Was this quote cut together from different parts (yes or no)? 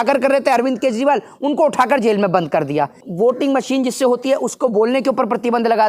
yes